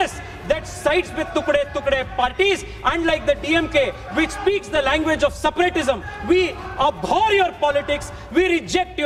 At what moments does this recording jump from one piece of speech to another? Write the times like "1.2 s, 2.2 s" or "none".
none